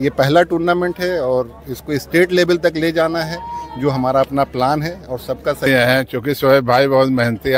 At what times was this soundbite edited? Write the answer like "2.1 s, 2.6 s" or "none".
5.7 s